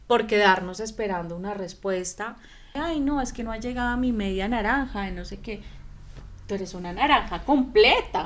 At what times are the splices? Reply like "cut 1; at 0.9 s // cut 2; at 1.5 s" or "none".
cut 1; at 2.7 s